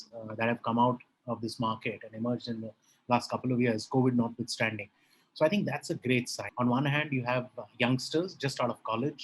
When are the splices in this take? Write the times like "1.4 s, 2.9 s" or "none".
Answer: 6.4 s